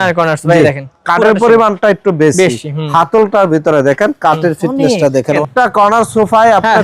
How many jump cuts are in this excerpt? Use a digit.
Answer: 1